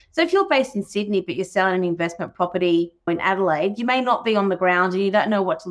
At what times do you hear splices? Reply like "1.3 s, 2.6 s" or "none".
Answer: none